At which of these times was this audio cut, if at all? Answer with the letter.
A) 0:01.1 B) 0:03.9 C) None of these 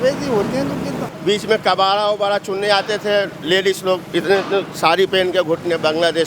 A